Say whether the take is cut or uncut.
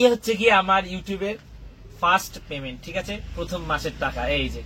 uncut